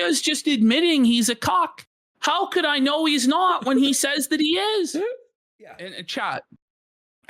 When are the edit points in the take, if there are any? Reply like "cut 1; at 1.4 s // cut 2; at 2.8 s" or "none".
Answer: cut 1; at 5.9 s